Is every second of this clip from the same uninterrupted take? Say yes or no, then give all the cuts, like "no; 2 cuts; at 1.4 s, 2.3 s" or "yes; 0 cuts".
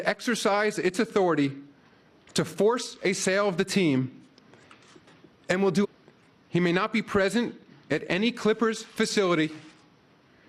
yes; 0 cuts